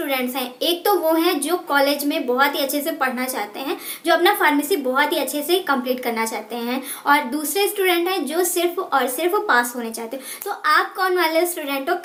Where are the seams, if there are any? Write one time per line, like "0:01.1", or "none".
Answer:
none